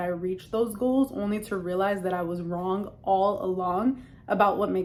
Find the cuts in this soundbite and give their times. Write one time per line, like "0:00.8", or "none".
none